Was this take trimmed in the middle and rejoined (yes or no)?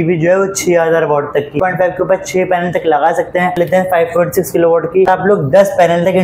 yes